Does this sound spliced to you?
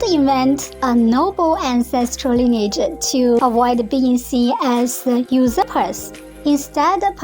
yes; 1 cut; at 3.4 s

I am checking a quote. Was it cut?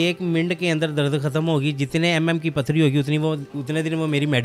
no; 0 cuts

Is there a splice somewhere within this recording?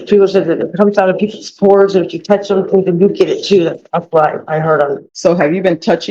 yes; 1 cut; at 5.1 s

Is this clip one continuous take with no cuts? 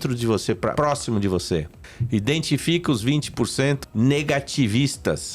no; 2 cuts; at 0.7 s, 3.8 s

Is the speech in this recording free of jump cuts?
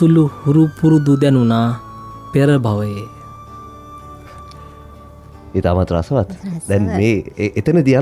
yes; 0 cuts

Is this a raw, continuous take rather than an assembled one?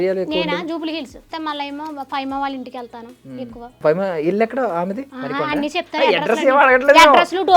no; 3 cuts; at 1.3 s, 3.8 s, 5.1 s

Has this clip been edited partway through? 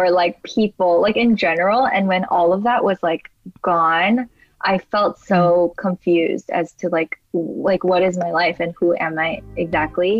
no; 0 cuts

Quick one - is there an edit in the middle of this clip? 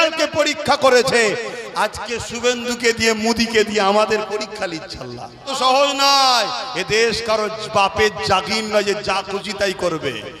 yes; 1 cut; at 5.5 s

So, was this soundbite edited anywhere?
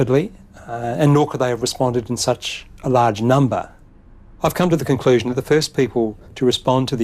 yes; 1 cut; at 5.3 s

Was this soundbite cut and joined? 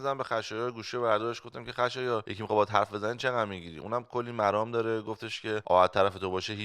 yes; 2 cuts; at 2.3 s, 5.6 s

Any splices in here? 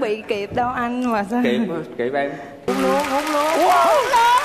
yes; 1 cut; at 2.7 s

